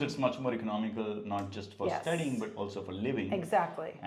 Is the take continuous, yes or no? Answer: yes